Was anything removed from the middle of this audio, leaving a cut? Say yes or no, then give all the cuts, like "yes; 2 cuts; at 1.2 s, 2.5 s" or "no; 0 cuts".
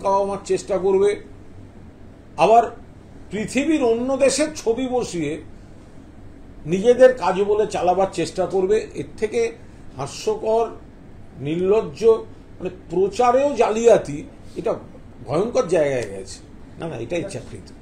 yes; 1 cut; at 16.5 s